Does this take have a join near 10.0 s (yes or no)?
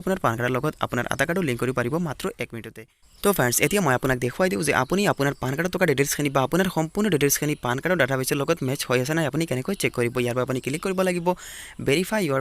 no